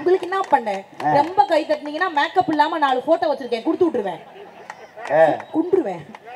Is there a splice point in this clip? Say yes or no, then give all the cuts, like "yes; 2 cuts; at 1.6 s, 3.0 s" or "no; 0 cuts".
no; 0 cuts